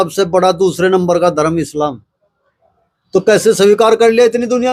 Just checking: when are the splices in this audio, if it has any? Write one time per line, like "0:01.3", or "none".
none